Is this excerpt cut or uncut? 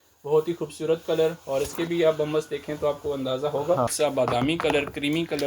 cut